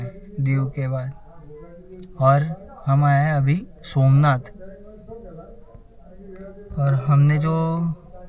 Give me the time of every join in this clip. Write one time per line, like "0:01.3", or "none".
none